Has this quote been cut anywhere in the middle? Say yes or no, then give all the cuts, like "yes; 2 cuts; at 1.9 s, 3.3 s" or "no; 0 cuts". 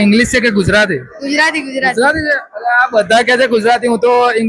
no; 0 cuts